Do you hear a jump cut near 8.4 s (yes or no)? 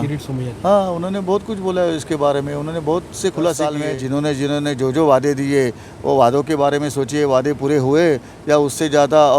no